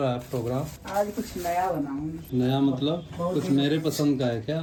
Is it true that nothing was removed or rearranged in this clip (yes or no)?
yes